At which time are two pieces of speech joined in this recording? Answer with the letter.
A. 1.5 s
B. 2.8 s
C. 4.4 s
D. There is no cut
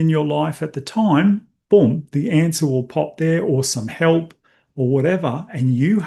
D